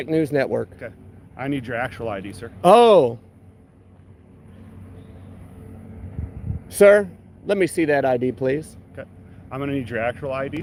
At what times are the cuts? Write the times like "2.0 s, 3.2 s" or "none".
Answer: none